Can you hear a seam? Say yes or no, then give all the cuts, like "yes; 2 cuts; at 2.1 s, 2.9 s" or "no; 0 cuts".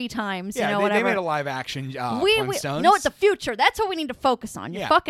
no; 0 cuts